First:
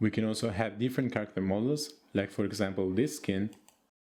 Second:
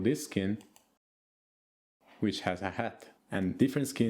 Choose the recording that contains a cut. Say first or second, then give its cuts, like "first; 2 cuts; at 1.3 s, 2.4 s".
second; 1 cut; at 3.1 s